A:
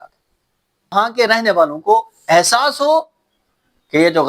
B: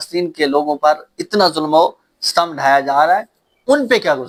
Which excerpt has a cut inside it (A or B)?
A